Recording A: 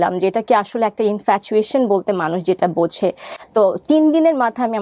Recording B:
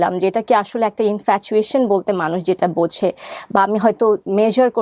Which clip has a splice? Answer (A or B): A